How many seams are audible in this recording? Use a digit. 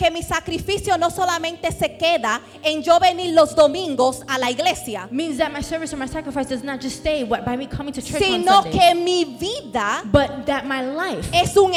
0